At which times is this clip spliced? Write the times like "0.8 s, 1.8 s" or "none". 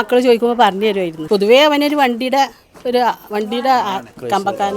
1.1 s